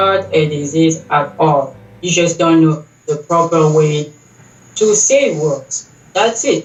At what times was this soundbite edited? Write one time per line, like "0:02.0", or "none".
none